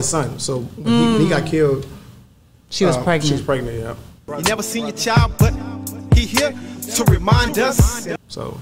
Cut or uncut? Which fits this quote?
uncut